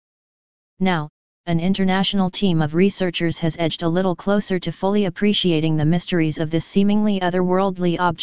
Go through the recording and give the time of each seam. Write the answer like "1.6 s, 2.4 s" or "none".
3.0 s